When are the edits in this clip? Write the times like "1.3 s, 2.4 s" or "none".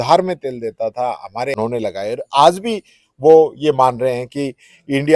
1.5 s